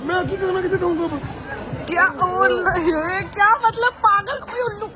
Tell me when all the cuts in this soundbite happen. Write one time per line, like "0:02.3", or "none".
none